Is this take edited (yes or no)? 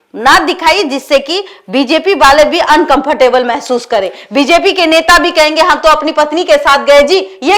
no